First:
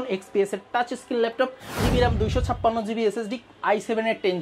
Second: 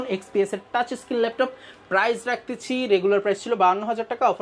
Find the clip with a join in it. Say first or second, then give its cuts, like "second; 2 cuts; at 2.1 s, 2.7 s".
first; 1 cut; at 1.8 s